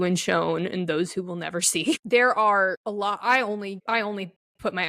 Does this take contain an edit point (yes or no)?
yes